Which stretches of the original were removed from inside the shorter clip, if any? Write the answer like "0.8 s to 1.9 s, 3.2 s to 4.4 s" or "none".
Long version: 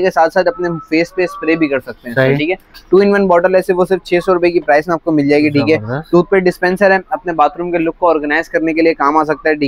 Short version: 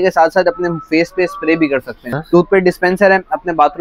2.1 s to 5.9 s